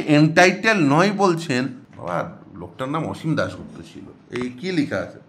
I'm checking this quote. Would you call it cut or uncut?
cut